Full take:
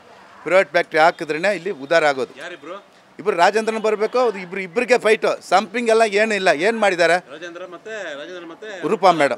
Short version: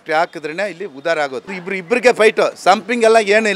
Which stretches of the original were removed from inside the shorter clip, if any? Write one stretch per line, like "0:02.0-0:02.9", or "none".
0:02.5-0:04.5